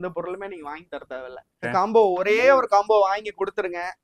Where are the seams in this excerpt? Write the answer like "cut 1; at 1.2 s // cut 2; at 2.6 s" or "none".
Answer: cut 1; at 1.6 s